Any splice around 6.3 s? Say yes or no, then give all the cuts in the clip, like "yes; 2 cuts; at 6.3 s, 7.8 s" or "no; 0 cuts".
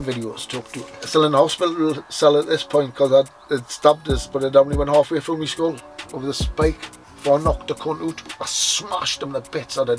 no; 2 cuts; at 1.0 s, 8.3 s